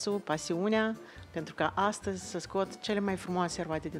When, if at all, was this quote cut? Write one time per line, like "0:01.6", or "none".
none